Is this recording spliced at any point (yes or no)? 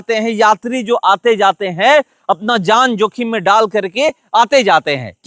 no